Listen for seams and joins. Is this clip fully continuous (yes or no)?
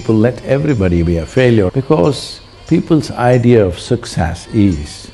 no